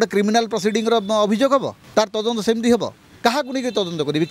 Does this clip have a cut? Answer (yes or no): yes